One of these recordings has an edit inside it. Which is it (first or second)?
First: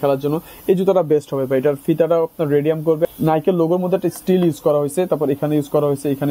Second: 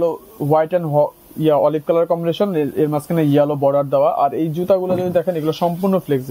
first